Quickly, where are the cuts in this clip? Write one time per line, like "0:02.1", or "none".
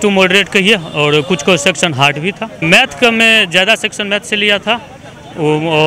0:02.6